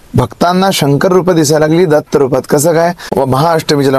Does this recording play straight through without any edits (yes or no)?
no